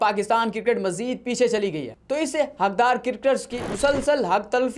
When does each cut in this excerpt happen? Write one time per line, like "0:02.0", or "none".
0:02.0